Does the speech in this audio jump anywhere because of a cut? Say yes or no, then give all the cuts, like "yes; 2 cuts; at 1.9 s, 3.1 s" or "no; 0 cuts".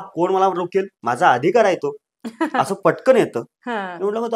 yes; 1 cut; at 1.0 s